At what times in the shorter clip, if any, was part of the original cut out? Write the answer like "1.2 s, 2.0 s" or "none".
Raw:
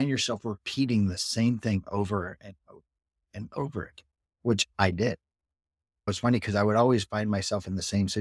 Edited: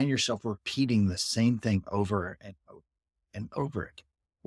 none

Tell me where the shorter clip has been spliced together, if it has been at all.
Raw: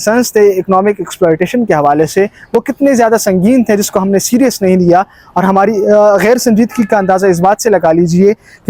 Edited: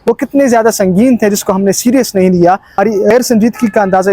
3.1 s

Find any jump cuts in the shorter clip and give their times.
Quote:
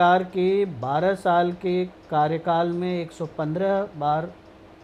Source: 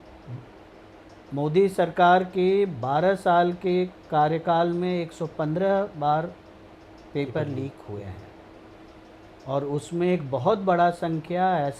none

